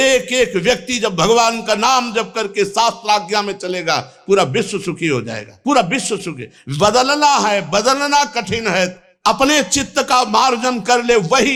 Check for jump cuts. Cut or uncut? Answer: uncut